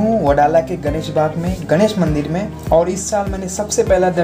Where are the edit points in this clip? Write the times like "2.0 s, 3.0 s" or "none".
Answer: 2.5 s